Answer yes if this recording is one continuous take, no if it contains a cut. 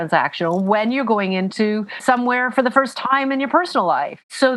no